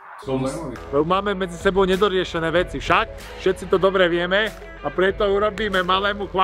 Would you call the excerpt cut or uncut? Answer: uncut